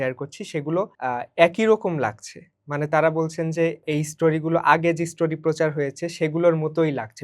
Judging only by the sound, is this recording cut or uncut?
cut